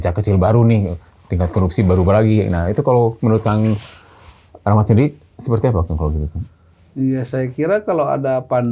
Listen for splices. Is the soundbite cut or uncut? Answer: uncut